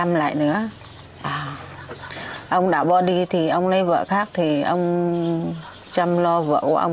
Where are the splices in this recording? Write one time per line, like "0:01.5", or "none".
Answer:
none